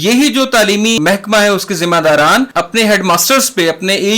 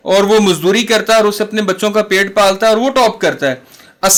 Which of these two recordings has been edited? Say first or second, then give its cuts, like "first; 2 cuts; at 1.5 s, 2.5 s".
first; 2 cuts; at 1.0 s, 2.5 s